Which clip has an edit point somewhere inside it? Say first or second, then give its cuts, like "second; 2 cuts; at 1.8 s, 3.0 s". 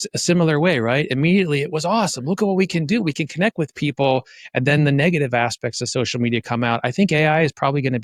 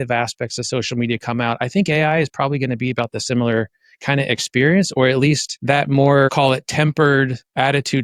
second; 2 cuts; at 5.5 s, 6.3 s